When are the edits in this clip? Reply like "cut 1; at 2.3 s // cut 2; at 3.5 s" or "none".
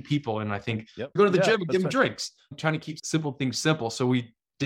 cut 1; at 1.1 s // cut 2; at 3.0 s